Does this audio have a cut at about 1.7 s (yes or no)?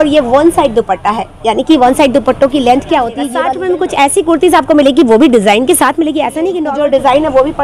no